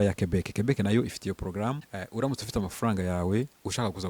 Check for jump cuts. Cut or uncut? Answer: cut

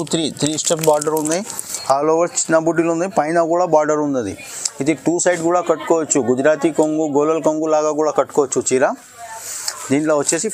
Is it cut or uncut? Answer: uncut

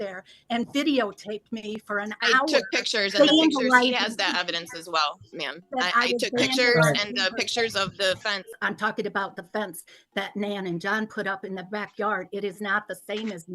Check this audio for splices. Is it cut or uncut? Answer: cut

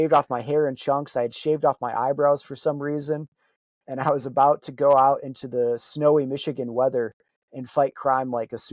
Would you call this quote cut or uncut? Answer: uncut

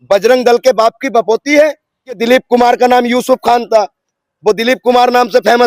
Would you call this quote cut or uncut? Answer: cut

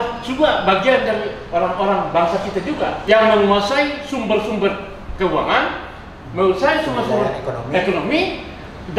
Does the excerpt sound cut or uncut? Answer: cut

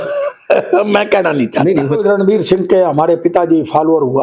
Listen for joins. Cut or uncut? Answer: cut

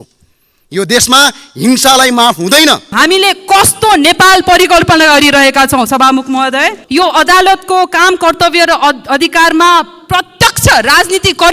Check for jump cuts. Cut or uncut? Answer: cut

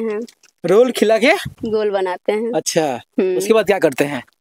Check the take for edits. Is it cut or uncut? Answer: uncut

